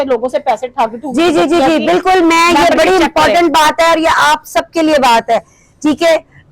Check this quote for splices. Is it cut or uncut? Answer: uncut